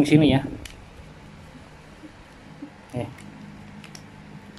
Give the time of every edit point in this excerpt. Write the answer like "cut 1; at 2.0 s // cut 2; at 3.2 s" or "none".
none